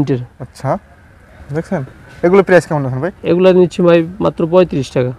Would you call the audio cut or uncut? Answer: uncut